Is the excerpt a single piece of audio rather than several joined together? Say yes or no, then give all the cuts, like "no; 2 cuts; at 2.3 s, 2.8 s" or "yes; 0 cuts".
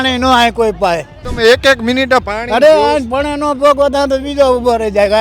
no; 1 cut; at 1.2 s